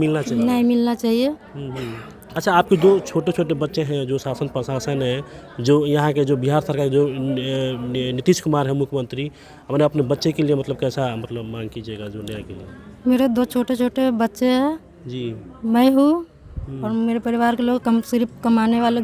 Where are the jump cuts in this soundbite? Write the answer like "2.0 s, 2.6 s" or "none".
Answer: none